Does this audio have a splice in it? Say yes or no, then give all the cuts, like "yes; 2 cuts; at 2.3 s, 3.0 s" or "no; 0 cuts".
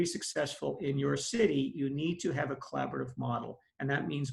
no; 0 cuts